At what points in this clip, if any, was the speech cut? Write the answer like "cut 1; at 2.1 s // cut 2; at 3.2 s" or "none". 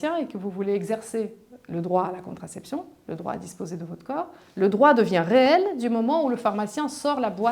none